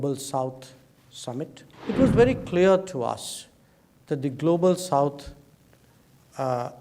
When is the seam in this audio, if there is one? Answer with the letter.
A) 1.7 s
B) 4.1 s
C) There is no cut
A